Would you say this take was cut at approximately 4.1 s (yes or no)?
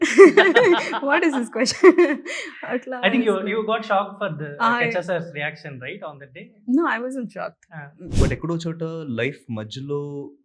no